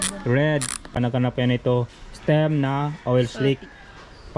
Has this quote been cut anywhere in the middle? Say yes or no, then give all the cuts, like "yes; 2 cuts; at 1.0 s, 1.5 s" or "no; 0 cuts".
yes; 1 cut; at 0.9 s